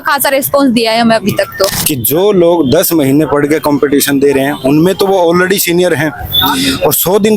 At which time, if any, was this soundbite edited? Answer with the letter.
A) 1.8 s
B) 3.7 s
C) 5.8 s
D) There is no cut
A